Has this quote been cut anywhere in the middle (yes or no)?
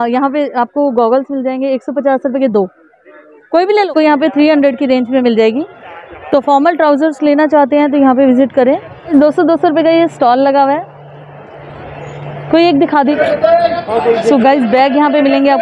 yes